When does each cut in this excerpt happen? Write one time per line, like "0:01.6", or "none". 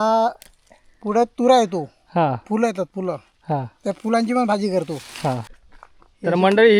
0:05.6